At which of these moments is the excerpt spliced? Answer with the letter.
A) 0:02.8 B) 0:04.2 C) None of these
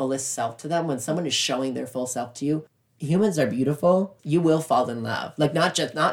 B